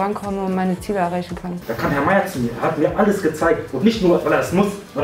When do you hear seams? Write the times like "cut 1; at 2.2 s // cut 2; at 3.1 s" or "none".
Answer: cut 1; at 1.4 s